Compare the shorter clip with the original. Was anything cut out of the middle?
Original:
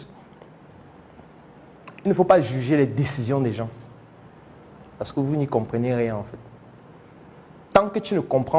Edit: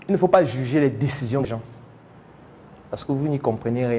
yes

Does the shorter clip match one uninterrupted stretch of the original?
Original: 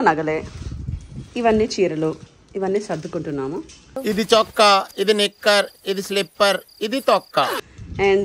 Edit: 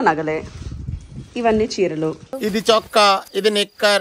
no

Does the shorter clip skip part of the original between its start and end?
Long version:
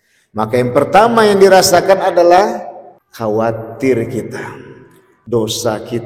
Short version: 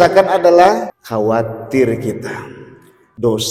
yes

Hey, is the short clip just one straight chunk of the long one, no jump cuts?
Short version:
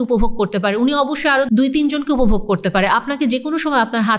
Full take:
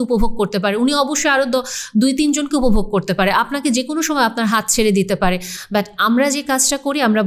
no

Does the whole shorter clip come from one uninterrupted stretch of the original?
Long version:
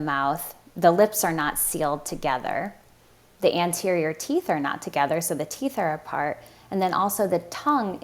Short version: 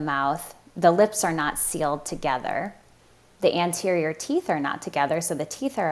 yes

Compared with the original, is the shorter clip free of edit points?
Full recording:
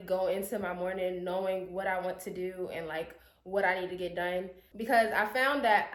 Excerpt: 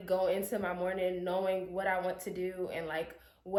yes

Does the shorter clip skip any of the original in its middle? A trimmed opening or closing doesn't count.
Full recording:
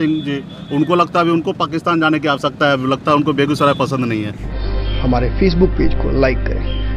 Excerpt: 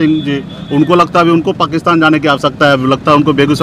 no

